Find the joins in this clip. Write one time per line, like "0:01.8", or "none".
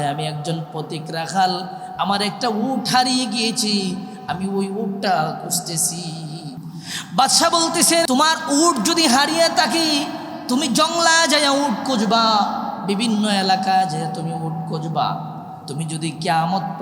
0:08.0